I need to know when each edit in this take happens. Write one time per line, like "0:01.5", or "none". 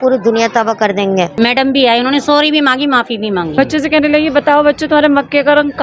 0:01.3
0:03.5